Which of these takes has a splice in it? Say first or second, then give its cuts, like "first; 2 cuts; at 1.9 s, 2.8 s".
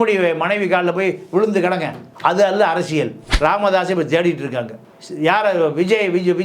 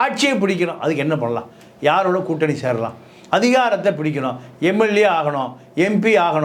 first; 1 cut; at 3.2 s